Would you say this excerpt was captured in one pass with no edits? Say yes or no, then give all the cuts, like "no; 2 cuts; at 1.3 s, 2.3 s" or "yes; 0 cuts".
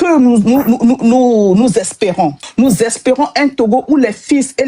no; 1 cut; at 2.4 s